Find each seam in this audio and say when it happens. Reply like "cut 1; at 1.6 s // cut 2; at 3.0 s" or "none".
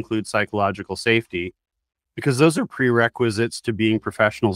none